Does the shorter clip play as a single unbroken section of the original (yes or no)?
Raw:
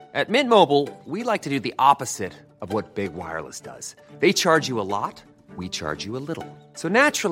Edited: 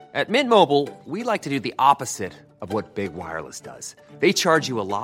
yes